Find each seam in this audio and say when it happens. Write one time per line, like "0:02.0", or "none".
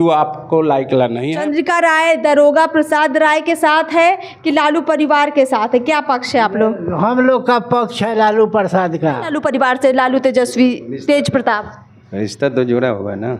0:01.2
0:09.3